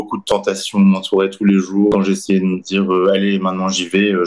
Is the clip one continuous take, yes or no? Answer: no